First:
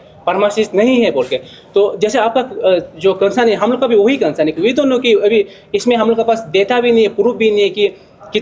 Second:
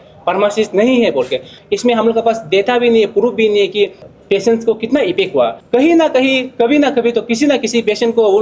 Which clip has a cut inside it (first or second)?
second